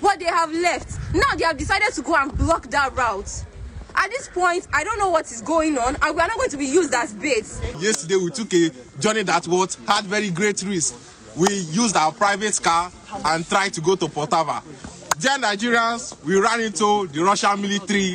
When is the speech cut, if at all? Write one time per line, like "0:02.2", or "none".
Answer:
0:07.7